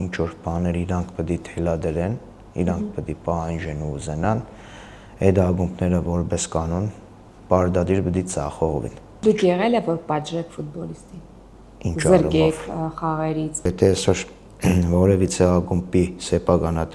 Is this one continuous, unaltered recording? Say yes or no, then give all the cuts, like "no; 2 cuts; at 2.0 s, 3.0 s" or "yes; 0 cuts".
no; 2 cuts; at 9.0 s, 13.7 s